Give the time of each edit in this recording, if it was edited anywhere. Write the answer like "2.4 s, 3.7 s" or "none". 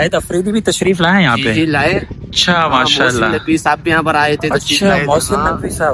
none